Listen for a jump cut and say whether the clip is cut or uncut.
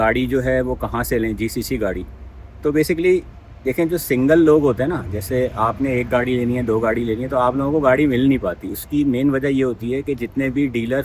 uncut